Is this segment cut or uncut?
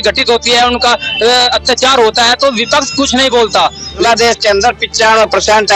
cut